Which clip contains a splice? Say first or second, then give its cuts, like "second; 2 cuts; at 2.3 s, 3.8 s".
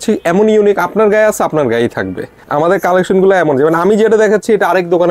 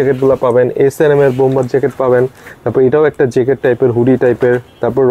first; 1 cut; at 2.4 s